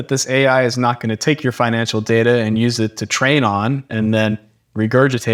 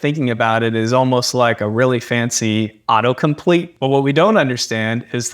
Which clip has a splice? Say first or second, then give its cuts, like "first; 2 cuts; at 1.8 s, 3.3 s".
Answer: second; 1 cut; at 3.7 s